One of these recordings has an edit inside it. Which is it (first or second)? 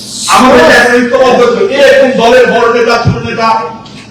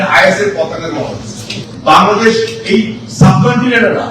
second